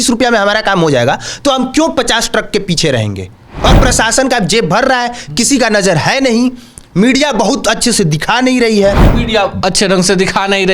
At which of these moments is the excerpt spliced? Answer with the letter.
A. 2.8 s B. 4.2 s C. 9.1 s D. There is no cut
C